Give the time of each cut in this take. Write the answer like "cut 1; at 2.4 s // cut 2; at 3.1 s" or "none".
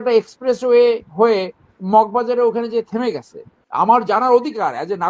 cut 1; at 3.6 s